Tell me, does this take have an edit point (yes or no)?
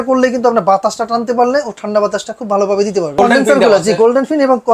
yes